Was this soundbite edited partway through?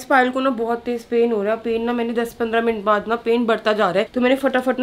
no; 0 cuts

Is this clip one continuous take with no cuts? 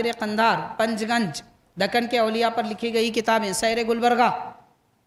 yes; 0 cuts

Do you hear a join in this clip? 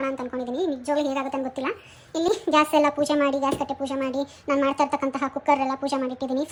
no; 0 cuts

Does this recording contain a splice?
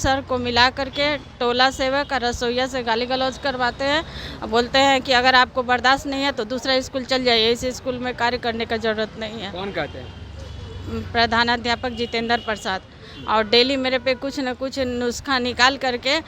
no; 0 cuts

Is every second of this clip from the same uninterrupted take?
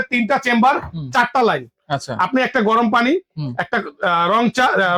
yes; 0 cuts

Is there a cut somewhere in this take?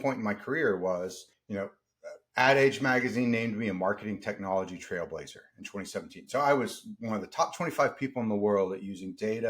no; 0 cuts

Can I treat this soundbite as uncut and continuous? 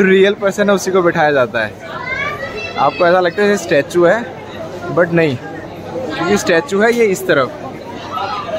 yes; 0 cuts

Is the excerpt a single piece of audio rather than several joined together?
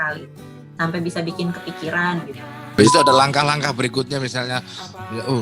no; 1 cut; at 2.8 s

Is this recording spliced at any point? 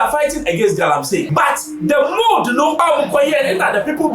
yes; 2 cuts; at 1.3 s, 2.8 s

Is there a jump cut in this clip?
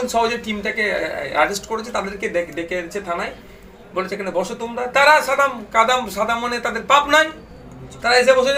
no; 0 cuts

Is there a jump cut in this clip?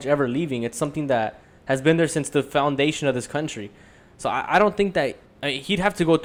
no; 0 cuts

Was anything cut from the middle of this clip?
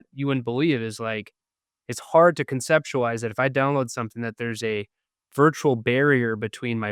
no; 0 cuts

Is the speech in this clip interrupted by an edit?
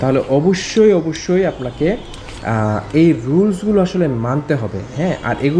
no; 0 cuts

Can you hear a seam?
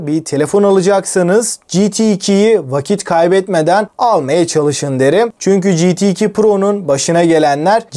no; 0 cuts

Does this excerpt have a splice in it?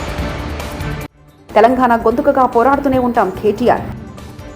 yes; 1 cut; at 1.3 s

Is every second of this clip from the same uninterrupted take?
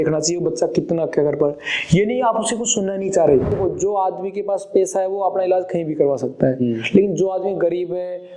no; 1 cut; at 3.6 s

